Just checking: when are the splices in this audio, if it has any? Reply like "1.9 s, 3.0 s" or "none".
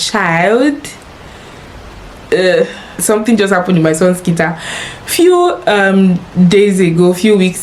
2.9 s